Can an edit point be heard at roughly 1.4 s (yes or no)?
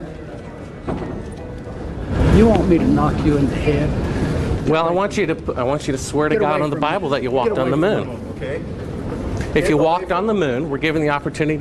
no